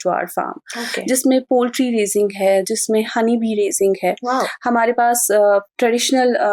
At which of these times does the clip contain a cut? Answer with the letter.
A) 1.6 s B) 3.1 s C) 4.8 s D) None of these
D